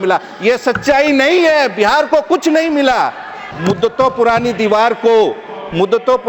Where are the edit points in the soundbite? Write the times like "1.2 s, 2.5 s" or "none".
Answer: 3.5 s